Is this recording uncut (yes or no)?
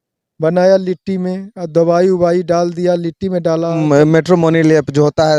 no